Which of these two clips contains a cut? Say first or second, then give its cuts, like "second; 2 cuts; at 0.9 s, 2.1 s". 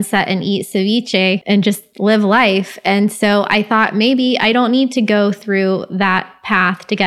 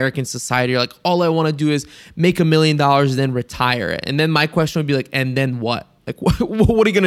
first; 1 cut; at 1.4 s